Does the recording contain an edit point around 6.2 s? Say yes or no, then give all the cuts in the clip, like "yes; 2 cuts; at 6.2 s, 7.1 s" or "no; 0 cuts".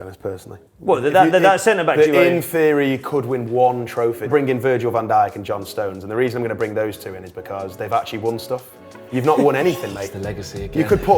no; 1 cut; at 4.3 s